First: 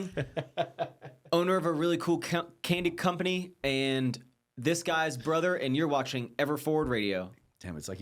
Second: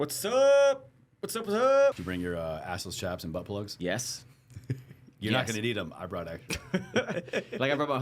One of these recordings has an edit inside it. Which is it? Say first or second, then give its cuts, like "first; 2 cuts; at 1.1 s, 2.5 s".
second; 2 cuts; at 2.0 s, 3.7 s